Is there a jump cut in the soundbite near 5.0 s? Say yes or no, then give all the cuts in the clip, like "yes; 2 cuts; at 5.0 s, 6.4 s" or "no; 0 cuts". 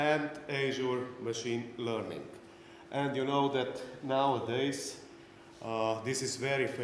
no; 1 cut; at 3.8 s